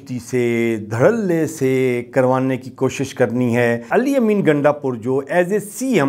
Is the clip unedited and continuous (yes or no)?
no